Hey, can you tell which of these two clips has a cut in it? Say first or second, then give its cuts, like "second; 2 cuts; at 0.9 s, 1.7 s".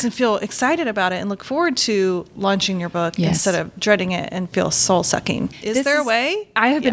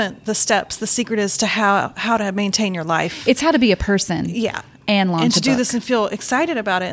first; 2 cuts; at 2.3 s, 5.6 s